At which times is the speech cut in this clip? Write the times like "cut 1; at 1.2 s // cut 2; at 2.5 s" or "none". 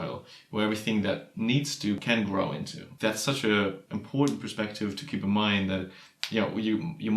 cut 1; at 2.0 s // cut 2; at 2.8 s // cut 3; at 3.9 s